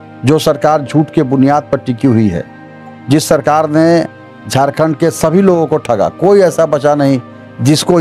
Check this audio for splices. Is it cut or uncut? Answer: uncut